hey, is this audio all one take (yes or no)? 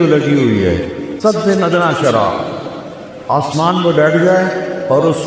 no